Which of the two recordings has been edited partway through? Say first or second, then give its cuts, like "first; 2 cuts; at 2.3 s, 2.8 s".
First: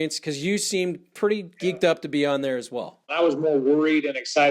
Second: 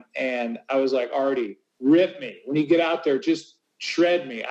first; 1 cut; at 3.1 s